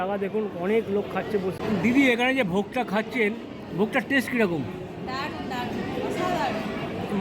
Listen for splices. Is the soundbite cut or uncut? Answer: cut